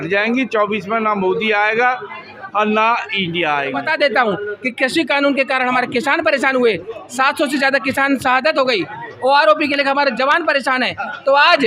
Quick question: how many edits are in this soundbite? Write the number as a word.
one